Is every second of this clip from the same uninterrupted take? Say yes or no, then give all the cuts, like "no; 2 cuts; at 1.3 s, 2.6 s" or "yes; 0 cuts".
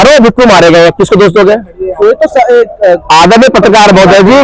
yes; 0 cuts